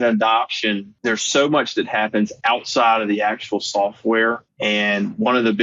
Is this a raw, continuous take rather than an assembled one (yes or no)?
no